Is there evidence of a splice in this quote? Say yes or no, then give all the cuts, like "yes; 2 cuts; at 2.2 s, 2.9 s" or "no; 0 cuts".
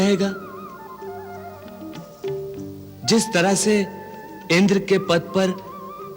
no; 0 cuts